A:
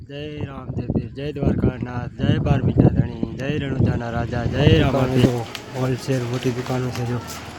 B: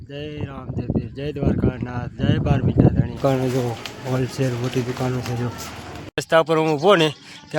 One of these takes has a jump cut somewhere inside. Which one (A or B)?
B